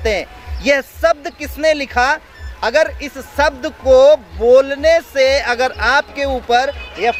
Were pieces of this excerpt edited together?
no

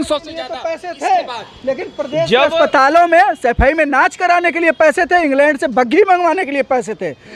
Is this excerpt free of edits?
yes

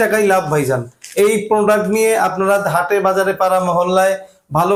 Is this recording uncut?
yes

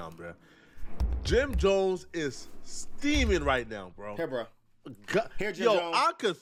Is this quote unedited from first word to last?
yes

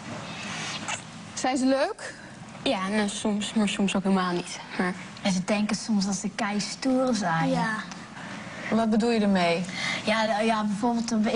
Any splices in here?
no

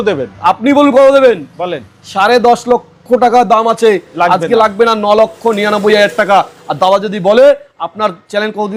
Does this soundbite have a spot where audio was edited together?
no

